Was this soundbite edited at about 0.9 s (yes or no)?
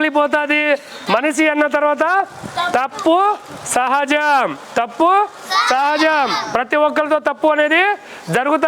yes